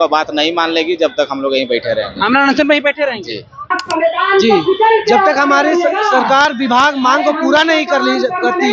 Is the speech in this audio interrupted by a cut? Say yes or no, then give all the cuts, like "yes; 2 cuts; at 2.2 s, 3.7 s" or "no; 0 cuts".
yes; 1 cut; at 3.8 s